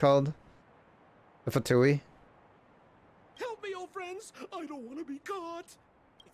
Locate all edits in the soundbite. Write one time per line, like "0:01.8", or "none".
none